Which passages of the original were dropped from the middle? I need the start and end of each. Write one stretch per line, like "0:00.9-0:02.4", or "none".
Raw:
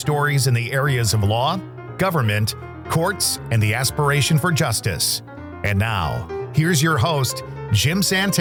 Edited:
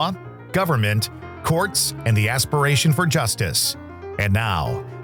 none